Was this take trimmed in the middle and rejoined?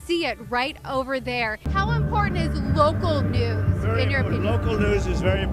yes; 1 cut; at 1.6 s

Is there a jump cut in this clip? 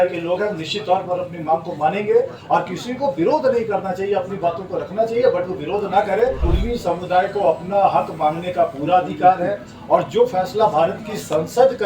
yes; 1 cut; at 6.4 s

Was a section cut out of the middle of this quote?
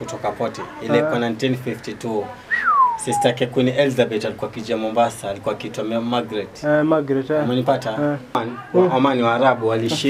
yes; 1 cut; at 8.4 s

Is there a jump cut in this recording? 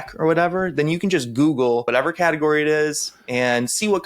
yes; 1 cut; at 1.9 s

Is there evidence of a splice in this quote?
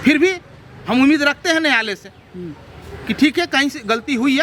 no; 0 cuts

